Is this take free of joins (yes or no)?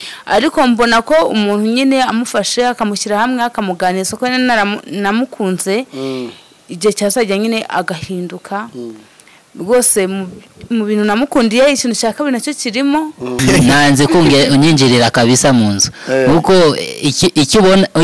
no